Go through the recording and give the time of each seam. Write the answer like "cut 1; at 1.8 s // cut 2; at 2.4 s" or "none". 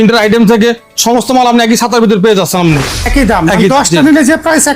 cut 1; at 3.0 s

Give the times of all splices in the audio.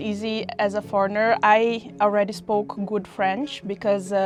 none

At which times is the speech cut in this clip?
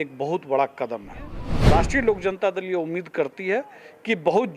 cut 1; at 1.5 s

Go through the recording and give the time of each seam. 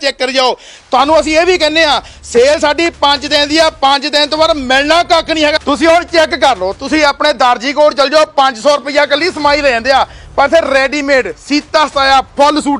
cut 1; at 5.6 s

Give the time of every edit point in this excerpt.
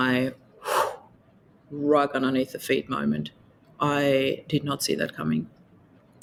none

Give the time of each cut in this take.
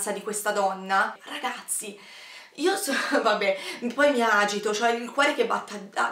cut 1; at 1.2 s

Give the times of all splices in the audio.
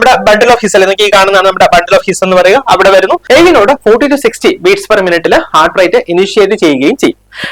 cut 1; at 3.2 s

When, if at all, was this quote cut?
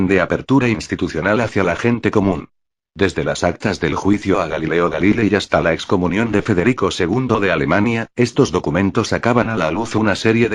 cut 1; at 8.2 s

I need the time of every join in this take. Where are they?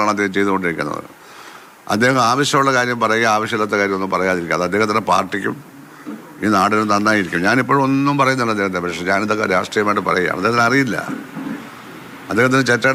none

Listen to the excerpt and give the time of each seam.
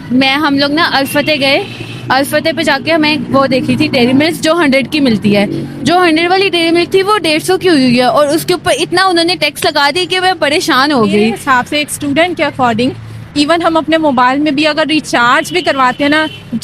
cut 1; at 11.4 s

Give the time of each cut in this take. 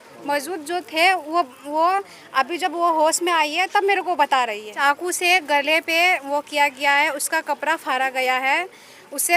cut 1; at 4.8 s

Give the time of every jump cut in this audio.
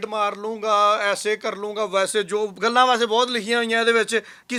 none

